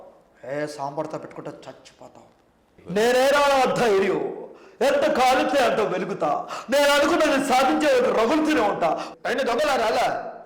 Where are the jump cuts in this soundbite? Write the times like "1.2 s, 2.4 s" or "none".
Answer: 2.7 s, 9.1 s